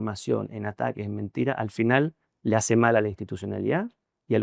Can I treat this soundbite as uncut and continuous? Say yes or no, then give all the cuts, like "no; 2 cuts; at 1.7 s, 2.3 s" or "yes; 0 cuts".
yes; 0 cuts